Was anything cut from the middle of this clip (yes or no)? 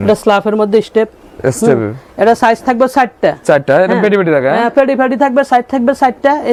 no